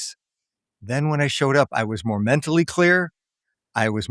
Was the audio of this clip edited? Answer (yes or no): no